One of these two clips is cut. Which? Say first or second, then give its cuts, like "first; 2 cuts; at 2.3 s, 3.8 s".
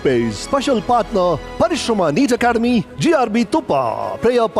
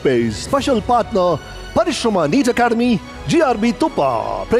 first; 2 cuts; at 1.5 s, 2.9 s